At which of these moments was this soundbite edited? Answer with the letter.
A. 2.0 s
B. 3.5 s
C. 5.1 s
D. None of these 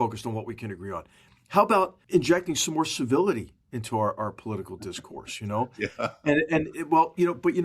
A